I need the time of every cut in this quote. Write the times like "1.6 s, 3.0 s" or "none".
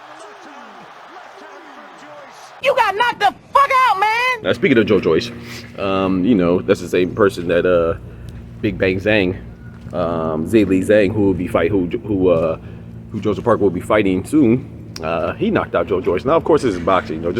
2.6 s, 4.4 s